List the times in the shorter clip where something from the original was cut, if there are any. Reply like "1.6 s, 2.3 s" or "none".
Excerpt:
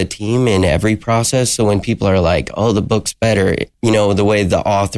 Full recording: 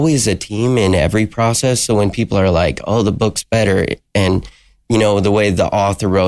3.7 s